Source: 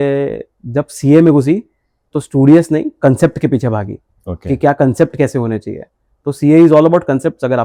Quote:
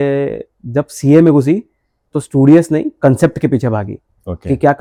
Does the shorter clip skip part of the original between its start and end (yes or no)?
no